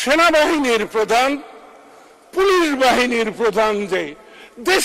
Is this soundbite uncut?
yes; 0 cuts

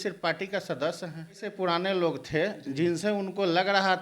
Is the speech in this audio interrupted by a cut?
yes; 1 cut; at 1.5 s

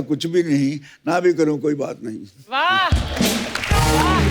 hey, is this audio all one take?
yes; 0 cuts

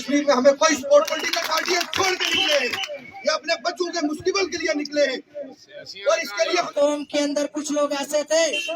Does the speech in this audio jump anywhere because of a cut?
yes; 2 cuts; at 1.1 s, 6.7 s

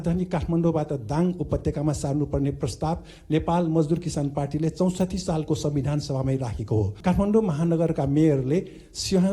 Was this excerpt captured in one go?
no; 1 cut; at 6.9 s

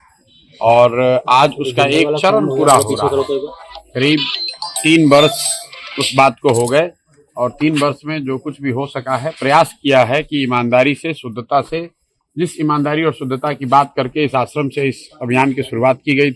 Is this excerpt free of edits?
yes; 0 cuts

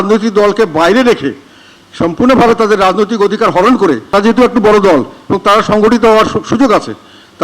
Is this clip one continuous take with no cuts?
no; 1 cut; at 4.1 s

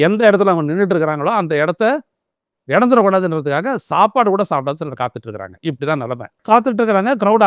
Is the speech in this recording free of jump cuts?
no; 1 cut; at 6.4 s

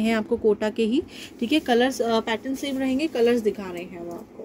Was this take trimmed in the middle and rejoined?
no; 0 cuts

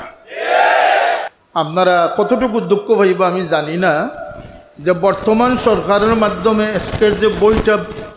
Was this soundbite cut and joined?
yes; 1 cut; at 1.4 s

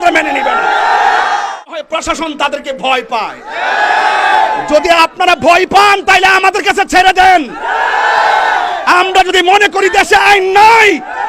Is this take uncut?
no; 1 cut; at 1.9 s

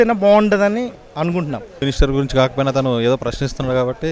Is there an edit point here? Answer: yes; 1 cut; at 1.8 s

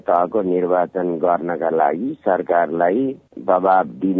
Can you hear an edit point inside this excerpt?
yes; 1 cut; at 3.3 s

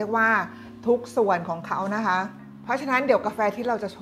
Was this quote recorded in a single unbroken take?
no; 1 cut; at 2.5 s

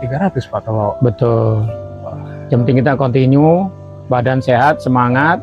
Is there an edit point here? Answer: no; 0 cuts

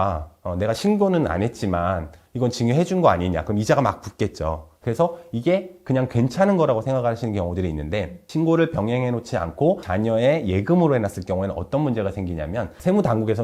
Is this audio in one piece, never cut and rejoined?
no; 1 cut; at 4.7 s

